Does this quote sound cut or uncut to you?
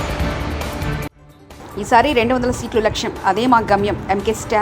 uncut